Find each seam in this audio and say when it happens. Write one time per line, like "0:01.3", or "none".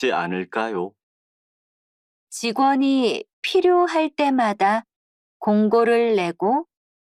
none